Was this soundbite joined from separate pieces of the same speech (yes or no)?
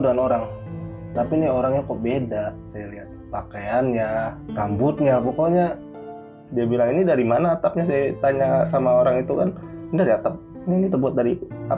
yes